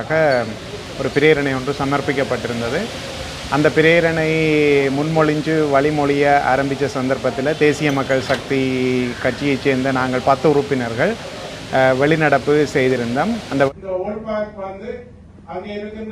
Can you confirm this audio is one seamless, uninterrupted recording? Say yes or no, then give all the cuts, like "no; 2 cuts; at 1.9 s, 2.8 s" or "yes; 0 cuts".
no; 1 cut; at 13.7 s